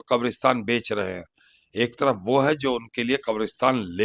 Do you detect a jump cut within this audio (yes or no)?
no